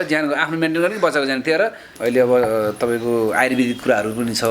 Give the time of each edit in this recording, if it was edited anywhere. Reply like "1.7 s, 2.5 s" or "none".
1.9 s